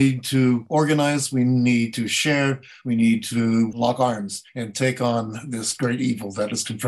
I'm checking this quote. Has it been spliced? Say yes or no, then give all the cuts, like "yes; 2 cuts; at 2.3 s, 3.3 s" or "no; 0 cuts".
no; 0 cuts